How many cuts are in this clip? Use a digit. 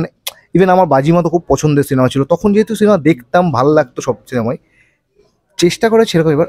0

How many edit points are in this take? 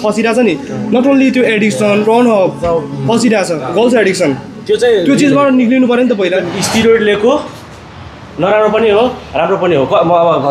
3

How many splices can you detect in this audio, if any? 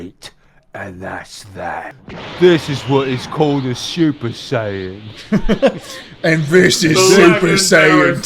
1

